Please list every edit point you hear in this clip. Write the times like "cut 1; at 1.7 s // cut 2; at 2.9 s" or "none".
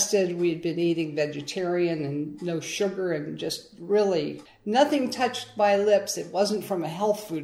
none